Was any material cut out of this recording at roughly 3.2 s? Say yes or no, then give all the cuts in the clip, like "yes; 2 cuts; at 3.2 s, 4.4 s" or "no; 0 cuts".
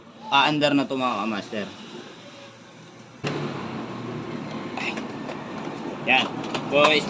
yes; 1 cut; at 3.2 s